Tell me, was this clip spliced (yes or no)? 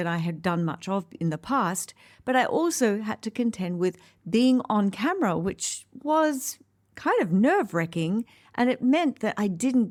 no